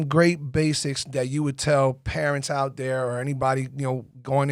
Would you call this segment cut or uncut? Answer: uncut